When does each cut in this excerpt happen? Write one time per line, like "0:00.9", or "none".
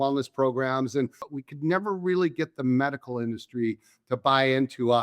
0:01.2

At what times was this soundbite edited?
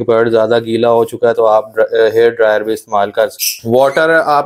0:03.4

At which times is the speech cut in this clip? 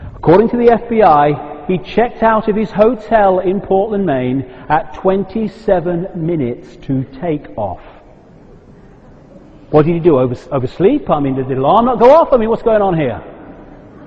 none

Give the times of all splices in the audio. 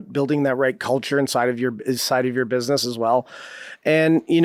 none

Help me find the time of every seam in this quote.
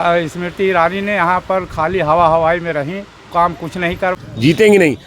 0:04.2

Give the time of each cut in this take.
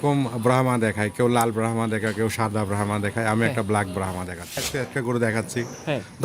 0:04.7

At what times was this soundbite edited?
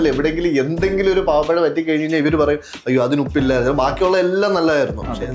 none

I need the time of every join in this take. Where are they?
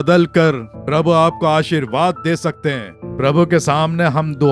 0:03.0

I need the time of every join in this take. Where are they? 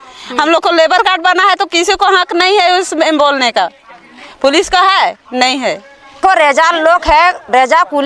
0:06.2

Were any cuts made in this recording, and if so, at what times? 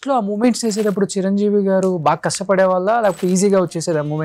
none

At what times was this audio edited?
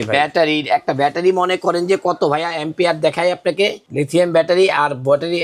0:03.8

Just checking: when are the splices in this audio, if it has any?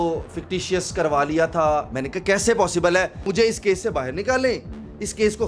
0:03.2

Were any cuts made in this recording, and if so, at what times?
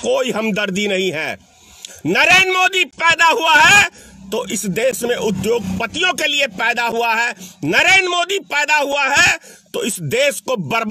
none

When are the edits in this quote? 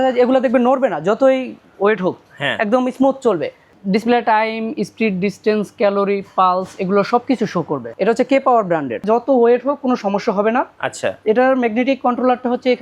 0:03.7
0:07.9
0:09.0

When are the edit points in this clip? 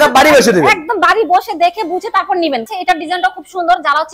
0:02.7

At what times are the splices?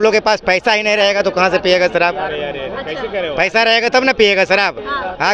none

